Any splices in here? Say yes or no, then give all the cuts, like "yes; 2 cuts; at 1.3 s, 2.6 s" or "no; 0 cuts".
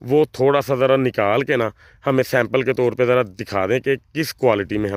no; 0 cuts